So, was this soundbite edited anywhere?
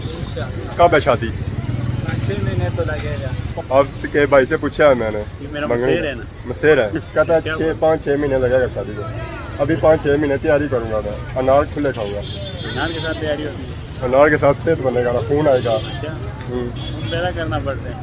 yes; 2 cuts; at 3.4 s, 7.0 s

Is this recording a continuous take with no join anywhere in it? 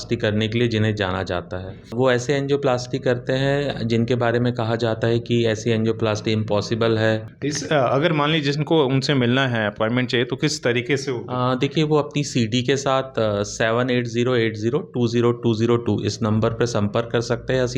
no; 2 cuts; at 1.9 s, 7.3 s

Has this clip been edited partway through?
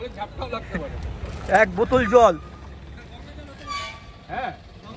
no; 0 cuts

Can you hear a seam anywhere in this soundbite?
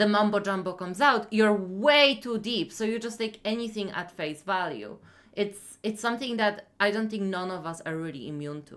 no; 0 cuts

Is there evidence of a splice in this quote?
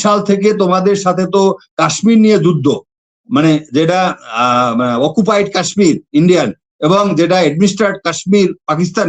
no; 0 cuts

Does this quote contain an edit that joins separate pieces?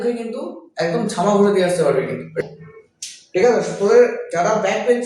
yes; 1 cut; at 2.4 s

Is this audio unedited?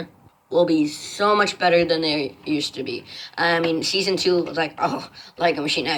yes; 0 cuts

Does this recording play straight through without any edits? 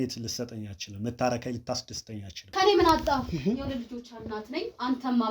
no; 1 cut; at 2.5 s

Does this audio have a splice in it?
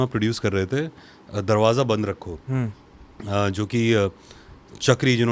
no; 0 cuts

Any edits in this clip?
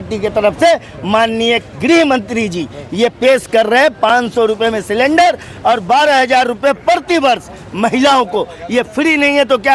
no; 0 cuts

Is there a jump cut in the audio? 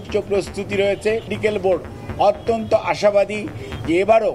yes; 1 cut; at 1.3 s

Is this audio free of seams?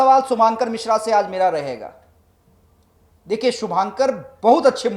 yes; 0 cuts

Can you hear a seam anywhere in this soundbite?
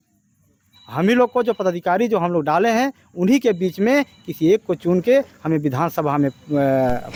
no; 0 cuts

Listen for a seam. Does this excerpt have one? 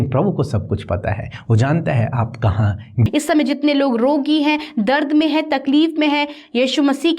yes; 1 cut; at 3.1 s

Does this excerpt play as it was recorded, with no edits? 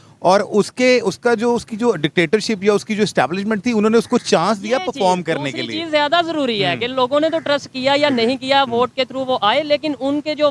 yes; 0 cuts

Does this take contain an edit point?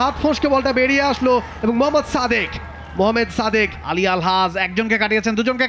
yes; 1 cut; at 3.8 s

